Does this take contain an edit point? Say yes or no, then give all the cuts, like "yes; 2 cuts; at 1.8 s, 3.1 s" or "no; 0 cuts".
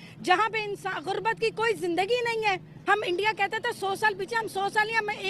yes; 1 cut; at 2.7 s